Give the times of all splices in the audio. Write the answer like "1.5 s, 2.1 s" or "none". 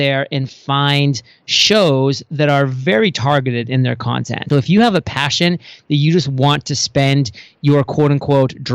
4.4 s